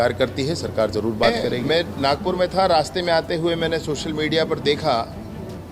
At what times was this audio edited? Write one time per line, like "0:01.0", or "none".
0:01.6